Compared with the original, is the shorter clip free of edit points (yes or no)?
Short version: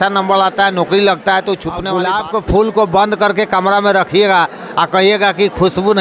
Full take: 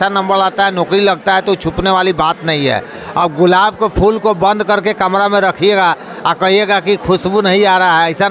no